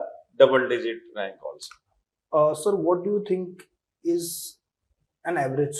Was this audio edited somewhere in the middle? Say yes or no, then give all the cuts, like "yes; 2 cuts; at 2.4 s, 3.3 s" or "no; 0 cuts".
no; 0 cuts